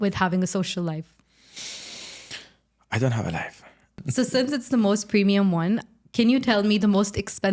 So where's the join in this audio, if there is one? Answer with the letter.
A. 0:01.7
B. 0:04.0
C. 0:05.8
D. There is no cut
B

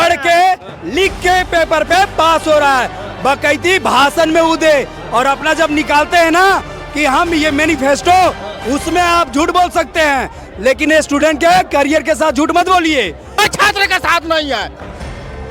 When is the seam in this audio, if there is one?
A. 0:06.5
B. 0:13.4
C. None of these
B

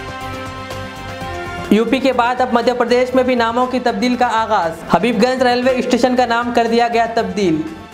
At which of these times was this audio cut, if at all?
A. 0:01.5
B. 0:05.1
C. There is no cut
A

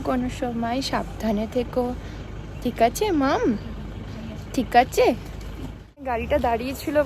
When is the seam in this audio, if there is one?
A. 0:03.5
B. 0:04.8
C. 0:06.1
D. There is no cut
C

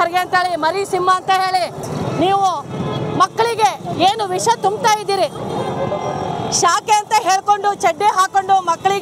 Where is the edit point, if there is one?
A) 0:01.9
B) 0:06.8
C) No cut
A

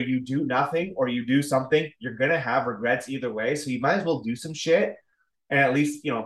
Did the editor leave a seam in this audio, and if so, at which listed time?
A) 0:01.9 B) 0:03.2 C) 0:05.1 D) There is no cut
D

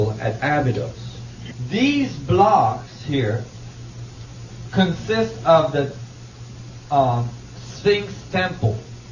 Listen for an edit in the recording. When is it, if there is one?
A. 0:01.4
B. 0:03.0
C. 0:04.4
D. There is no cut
B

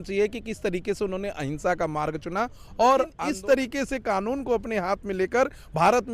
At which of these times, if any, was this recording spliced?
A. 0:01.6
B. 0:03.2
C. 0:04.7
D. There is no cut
B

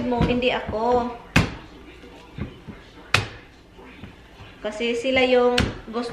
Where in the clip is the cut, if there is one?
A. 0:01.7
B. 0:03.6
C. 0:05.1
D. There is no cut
D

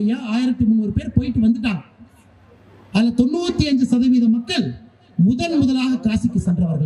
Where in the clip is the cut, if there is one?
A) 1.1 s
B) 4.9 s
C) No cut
C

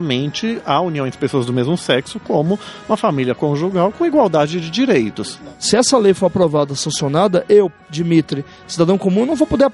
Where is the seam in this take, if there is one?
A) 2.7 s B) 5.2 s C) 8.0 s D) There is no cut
B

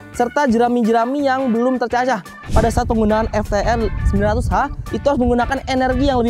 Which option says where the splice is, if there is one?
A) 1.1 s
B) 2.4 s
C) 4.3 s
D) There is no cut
B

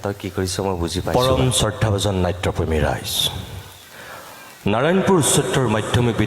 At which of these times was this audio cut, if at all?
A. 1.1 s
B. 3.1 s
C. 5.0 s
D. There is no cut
A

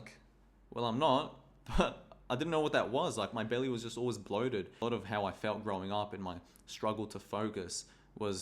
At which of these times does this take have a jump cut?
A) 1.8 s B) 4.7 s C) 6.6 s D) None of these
B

